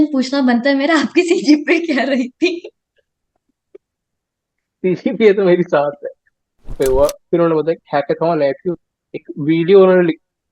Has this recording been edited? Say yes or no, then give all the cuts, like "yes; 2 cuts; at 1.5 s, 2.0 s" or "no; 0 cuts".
yes; 1 cut; at 6.7 s